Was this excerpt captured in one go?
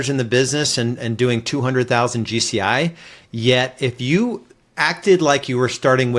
yes; 0 cuts

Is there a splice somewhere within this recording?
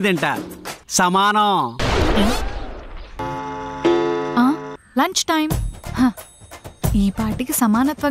yes; 1 cut; at 3.2 s

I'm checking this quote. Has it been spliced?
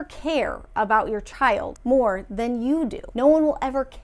yes; 2 cuts; at 1.7 s, 3.0 s

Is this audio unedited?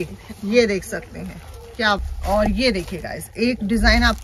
no; 1 cut; at 2.1 s

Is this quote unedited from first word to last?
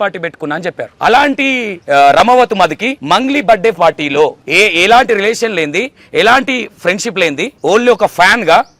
no; 5 cuts; at 0.9 s, 1.7 s, 2.9 s, 4.4 s, 7.5 s

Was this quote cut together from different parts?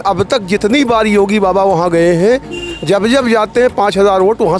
no; 0 cuts

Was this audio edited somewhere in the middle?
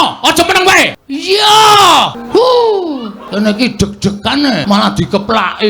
yes; 4 cuts; at 1.1 s, 2.2 s, 3.2 s, 4.6 s

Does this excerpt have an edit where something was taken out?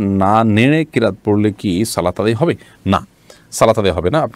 no; 0 cuts

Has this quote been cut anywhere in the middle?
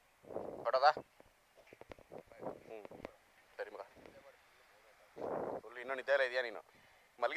no; 0 cuts

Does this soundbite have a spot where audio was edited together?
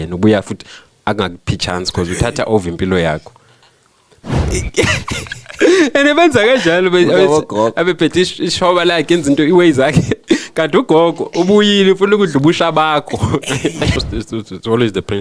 yes; 2 cuts; at 4.5 s, 14.0 s

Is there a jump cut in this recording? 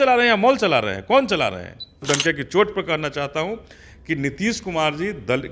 yes; 1 cut; at 2.0 s

